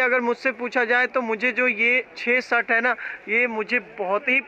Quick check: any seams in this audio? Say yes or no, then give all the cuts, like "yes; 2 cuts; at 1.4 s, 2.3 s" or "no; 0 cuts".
no; 0 cuts